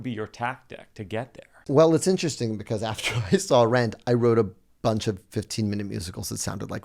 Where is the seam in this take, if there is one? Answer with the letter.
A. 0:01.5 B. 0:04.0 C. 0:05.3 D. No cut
A